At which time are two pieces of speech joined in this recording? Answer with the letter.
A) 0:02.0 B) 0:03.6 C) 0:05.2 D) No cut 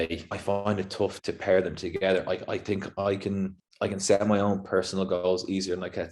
B